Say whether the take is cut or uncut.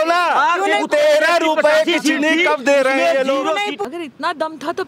cut